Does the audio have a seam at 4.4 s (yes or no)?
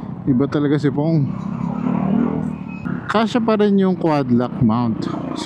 no